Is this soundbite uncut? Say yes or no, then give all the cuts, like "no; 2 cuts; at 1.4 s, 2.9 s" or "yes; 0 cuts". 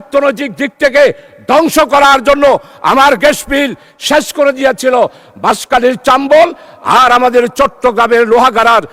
yes; 0 cuts